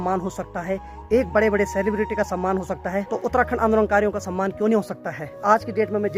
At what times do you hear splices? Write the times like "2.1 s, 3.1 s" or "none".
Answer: 3.1 s, 5.3 s